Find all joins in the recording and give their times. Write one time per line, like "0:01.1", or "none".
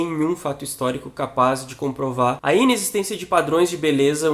0:02.4